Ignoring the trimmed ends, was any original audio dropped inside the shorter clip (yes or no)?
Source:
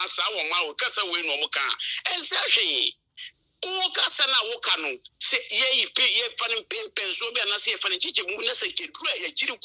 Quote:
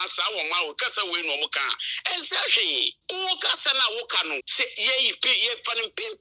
yes